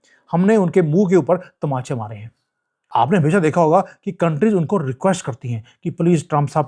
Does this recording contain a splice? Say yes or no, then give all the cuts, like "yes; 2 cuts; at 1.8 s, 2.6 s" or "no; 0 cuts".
yes; 1 cut; at 2.8 s